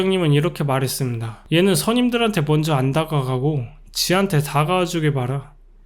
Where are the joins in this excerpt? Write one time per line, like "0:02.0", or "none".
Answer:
0:01.3